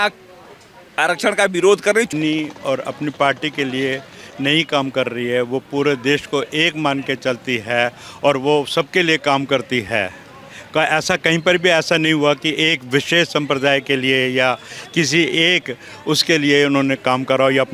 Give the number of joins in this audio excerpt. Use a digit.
1